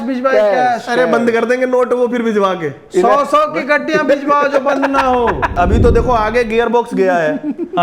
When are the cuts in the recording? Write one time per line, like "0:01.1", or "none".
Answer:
0:05.5